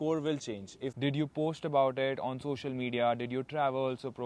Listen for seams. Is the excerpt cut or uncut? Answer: cut